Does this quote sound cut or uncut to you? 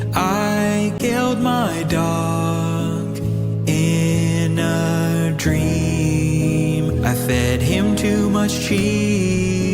cut